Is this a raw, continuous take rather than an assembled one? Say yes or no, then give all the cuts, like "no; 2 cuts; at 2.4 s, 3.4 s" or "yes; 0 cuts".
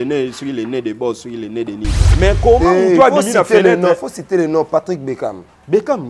no; 1 cut; at 2.0 s